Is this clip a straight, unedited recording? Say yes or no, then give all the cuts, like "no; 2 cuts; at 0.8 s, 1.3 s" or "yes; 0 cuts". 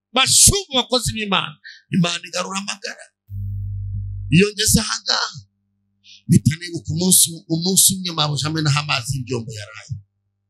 yes; 0 cuts